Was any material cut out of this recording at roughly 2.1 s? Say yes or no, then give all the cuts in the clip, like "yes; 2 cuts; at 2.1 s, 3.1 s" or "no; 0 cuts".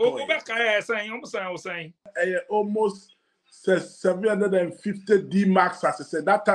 yes; 1 cut; at 2.1 s